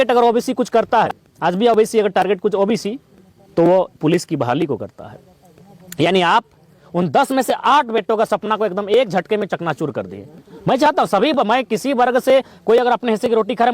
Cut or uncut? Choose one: cut